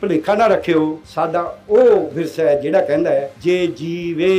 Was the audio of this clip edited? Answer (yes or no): yes